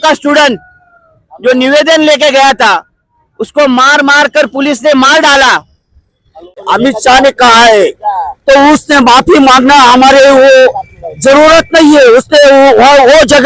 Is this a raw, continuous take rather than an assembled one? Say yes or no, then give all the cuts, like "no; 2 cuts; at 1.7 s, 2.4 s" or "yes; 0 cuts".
no; 1 cut; at 6.7 s